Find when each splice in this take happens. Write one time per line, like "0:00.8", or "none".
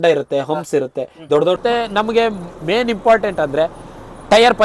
0:01.6